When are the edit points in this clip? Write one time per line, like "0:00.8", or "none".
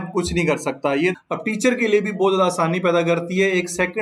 0:01.1